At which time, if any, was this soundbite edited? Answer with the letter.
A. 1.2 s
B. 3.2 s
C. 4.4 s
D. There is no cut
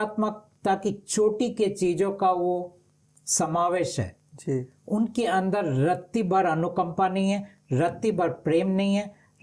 D